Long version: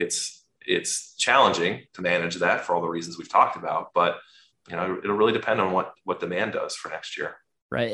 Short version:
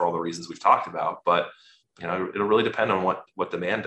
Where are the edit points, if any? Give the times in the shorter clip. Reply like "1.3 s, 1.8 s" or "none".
none